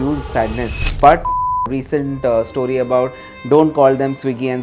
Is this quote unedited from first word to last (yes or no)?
no